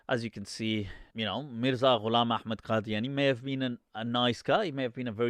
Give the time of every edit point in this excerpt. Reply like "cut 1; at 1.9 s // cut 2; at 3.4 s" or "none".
none